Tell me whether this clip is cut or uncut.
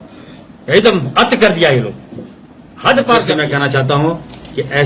cut